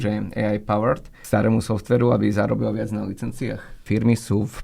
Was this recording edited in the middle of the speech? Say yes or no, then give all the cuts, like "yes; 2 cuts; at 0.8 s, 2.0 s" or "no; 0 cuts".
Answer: yes; 2 cuts; at 1.1 s, 3.8 s